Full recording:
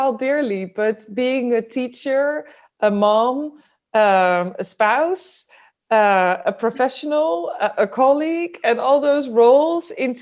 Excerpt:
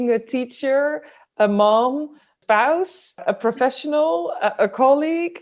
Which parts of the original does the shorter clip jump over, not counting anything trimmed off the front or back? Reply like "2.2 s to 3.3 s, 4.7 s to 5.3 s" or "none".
3.7 s to 4.6 s, 5.5 s to 6.4 s

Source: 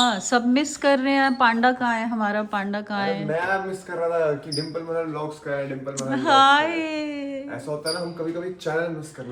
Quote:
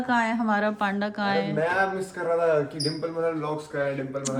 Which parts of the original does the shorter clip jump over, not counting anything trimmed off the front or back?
none

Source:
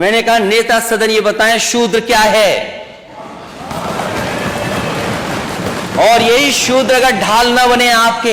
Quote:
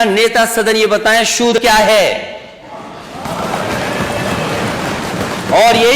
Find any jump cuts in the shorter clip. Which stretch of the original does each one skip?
1.9 s to 2.0 s

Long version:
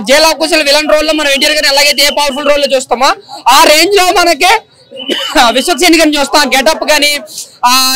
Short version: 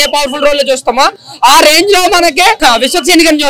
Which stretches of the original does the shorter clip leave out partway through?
4.6 s to 5.3 s

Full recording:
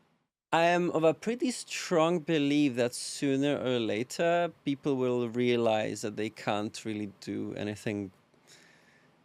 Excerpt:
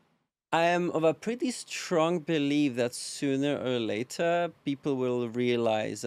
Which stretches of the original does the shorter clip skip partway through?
none

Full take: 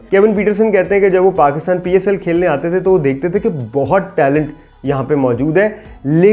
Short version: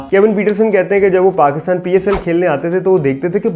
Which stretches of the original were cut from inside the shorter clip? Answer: none

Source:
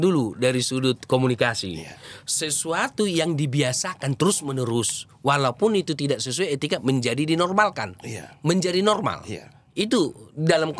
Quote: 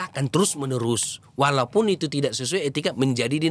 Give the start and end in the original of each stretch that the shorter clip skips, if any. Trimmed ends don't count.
none

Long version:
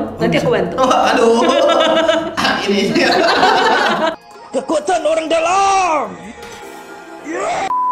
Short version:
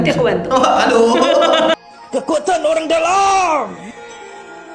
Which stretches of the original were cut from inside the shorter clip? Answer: 2.0 s to 4.2 s

